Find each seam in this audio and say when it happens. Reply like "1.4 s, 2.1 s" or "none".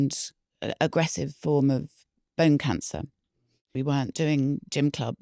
3.6 s